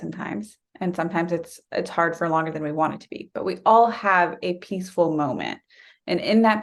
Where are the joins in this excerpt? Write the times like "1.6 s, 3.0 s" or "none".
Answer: none